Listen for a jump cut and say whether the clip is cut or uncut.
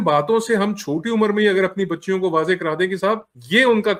uncut